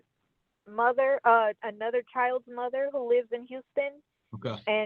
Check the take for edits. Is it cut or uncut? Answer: uncut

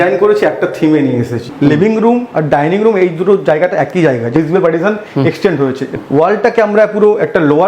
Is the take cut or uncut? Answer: cut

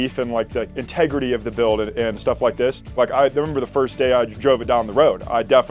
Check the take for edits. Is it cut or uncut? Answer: uncut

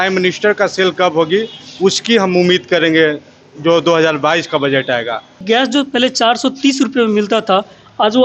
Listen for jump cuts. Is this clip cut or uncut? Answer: uncut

